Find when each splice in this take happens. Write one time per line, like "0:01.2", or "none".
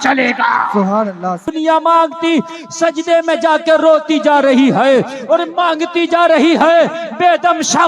0:01.5